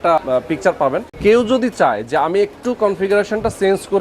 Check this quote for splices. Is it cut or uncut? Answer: cut